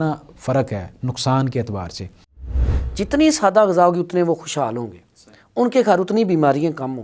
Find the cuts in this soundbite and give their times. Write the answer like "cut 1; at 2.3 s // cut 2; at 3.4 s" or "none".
cut 1; at 2.5 s